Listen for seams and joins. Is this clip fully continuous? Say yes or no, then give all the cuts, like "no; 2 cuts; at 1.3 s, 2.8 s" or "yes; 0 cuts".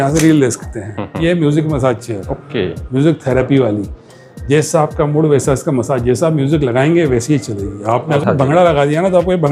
no; 2 cuts; at 1.0 s, 8.2 s